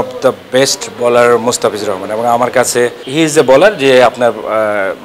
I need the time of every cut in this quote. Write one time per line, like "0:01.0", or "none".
0:03.0